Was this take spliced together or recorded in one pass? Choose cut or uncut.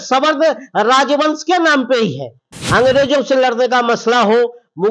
cut